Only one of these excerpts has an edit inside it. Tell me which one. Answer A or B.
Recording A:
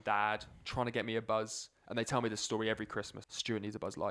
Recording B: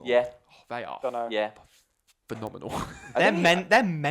A